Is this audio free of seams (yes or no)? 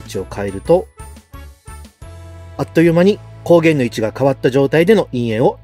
yes